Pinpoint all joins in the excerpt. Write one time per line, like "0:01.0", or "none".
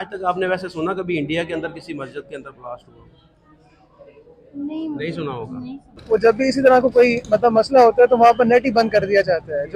0:06.0